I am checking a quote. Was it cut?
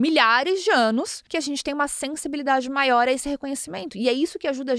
yes; 1 cut; at 1.2 s

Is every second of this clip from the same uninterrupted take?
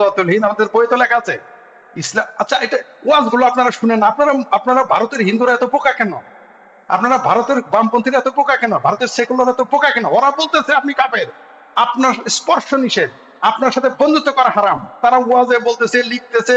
yes; 0 cuts

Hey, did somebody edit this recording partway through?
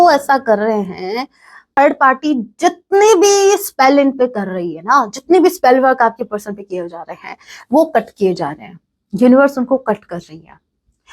yes; 1 cut; at 1.6 s

